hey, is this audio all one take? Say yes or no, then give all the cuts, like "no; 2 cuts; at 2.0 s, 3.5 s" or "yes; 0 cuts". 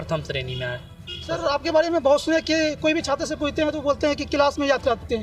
yes; 0 cuts